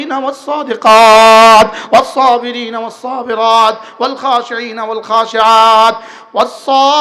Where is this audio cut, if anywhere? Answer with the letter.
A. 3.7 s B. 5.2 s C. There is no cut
C